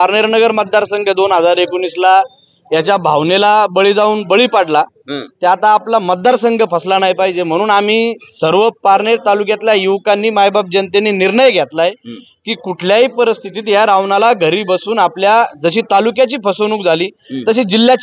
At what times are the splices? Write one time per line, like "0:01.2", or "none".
none